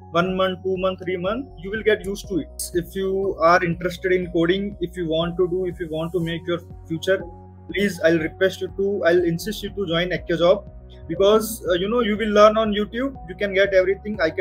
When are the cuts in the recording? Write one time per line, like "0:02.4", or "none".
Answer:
0:02.6